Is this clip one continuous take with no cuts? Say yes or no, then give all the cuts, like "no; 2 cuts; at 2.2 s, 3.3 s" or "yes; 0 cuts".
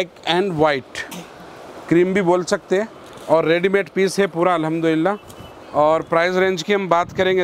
yes; 0 cuts